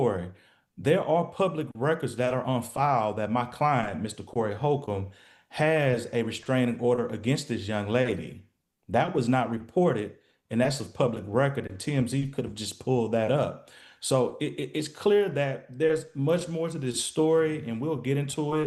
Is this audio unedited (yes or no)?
yes